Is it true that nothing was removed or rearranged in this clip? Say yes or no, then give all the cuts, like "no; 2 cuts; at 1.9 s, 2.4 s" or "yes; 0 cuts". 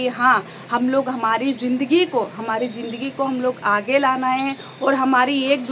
yes; 0 cuts